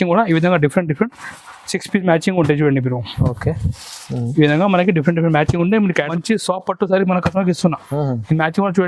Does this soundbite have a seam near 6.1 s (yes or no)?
yes